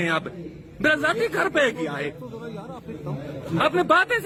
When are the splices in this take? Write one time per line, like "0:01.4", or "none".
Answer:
none